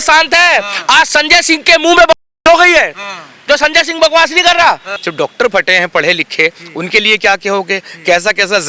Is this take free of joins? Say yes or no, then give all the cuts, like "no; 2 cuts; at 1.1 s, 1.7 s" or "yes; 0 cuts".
no; 1 cut; at 4.9 s